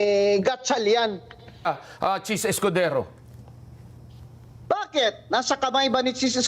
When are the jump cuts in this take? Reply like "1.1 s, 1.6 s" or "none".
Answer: 1.7 s